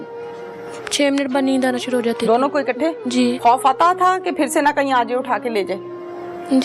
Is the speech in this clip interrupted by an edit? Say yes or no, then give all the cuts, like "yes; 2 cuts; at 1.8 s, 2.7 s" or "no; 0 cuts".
yes; 1 cut; at 3.4 s